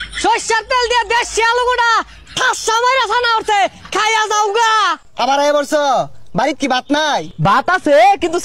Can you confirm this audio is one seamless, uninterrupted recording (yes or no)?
no